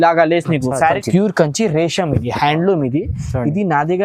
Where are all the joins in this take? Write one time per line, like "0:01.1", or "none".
0:01.0